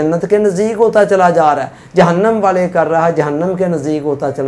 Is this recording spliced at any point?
no; 0 cuts

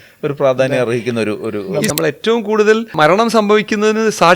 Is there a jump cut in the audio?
yes; 2 cuts; at 1.9 s, 2.9 s

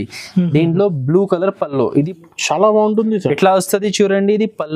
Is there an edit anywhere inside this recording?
yes; 1 cut; at 2.1 s

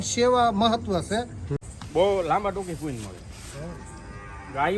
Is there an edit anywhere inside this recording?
yes; 1 cut; at 1.7 s

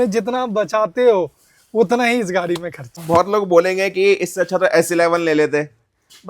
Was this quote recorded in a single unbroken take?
no; 1 cut; at 2.9 s

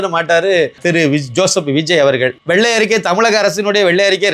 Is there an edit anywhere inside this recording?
yes; 2 cuts; at 0.8 s, 2.4 s

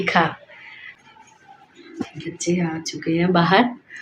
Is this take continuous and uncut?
no; 1 cut; at 1.0 s

